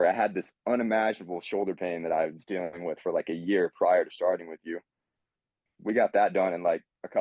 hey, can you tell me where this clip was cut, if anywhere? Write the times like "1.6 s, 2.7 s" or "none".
none